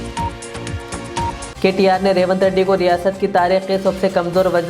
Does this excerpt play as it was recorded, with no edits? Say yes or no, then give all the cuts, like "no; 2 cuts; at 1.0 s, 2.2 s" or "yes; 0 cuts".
no; 1 cut; at 1.5 s